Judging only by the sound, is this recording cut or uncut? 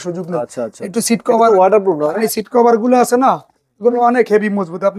cut